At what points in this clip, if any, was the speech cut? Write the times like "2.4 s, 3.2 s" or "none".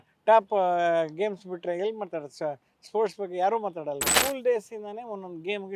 4.1 s

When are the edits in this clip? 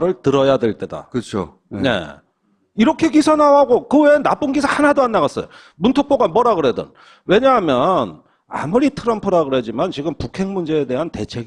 none

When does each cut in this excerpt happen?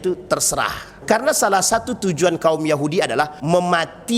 1.0 s, 3.4 s

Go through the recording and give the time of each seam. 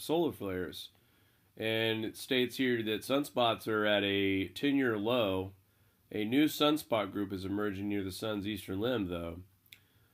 7.3 s

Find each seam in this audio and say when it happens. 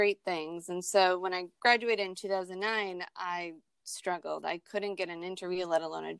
none

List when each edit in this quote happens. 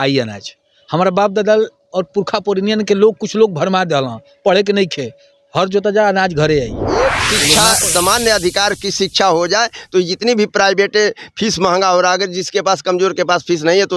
7.2 s

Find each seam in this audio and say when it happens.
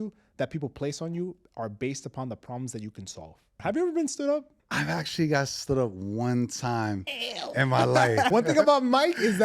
3.5 s, 4.5 s, 8.3 s

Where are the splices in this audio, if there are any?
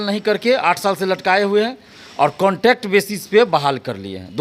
none

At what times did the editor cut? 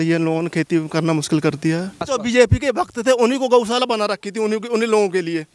2.1 s

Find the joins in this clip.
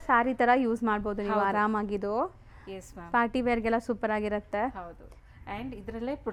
none

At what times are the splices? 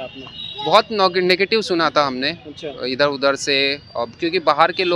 none

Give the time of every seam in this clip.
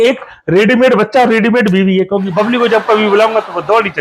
none

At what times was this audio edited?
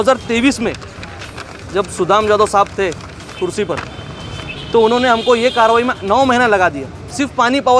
none

